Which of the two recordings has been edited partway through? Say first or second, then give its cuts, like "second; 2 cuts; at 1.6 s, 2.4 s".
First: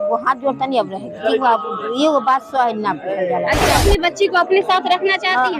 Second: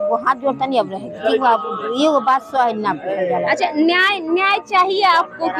first; 1 cut; at 3.7 s